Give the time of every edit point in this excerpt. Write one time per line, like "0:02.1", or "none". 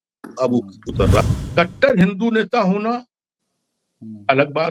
0:01.2